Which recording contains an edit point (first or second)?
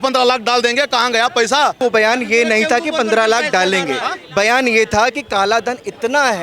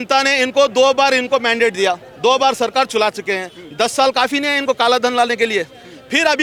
first